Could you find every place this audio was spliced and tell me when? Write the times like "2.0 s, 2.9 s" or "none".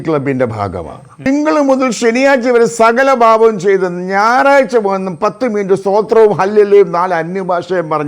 1.3 s

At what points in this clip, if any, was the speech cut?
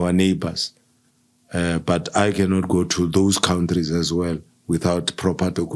none

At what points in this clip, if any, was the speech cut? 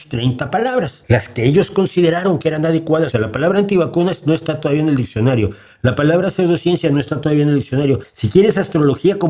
1.0 s, 3.1 s, 8.1 s

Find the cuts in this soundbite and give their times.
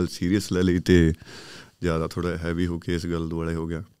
none

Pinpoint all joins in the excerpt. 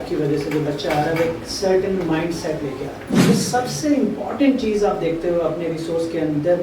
3.2 s

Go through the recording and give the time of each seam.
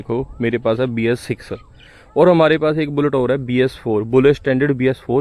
none

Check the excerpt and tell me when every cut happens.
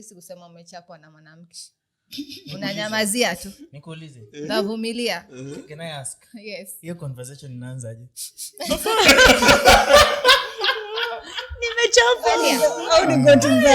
12.4 s

